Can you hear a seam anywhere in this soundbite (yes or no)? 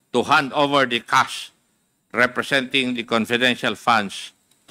no